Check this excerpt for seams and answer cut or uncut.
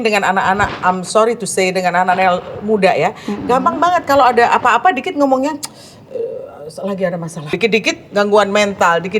cut